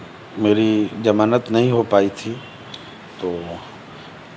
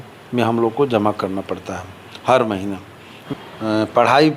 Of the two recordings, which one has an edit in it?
second; 1 cut; at 3.1 s

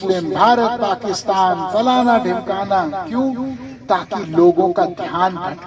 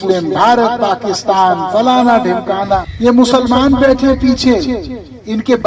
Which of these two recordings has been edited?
second; 1 cut; at 2.9 s

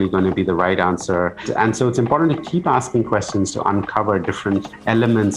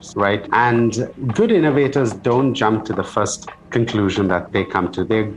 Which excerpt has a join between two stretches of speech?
first; 1 cut; at 1.5 s

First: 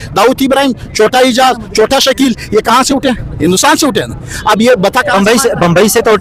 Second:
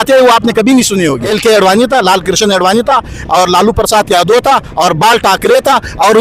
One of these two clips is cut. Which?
second; 1 cut; at 1.3 s

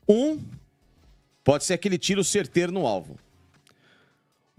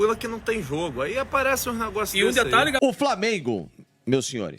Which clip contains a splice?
second; 1 cut; at 2.8 s

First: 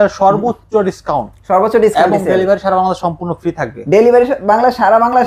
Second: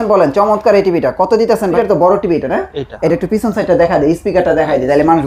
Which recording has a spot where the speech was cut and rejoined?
second; 1 cut; at 1.7 s

